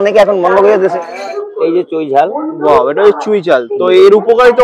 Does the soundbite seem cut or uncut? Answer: cut